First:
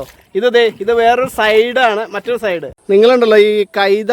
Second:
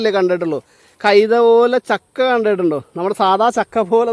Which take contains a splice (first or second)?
first